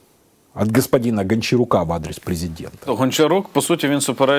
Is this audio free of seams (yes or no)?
no